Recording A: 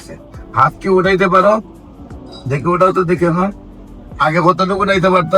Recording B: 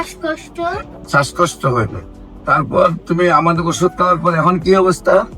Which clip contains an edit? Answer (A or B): B